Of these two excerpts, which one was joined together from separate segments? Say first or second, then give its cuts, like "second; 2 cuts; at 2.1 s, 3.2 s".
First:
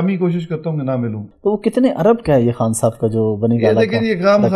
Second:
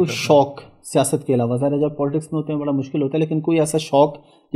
first; 1 cut; at 1.2 s